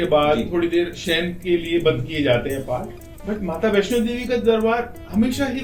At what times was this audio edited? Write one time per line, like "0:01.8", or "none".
none